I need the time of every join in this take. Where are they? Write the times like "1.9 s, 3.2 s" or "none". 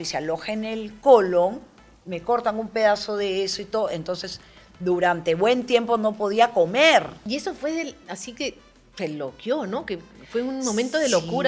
7.2 s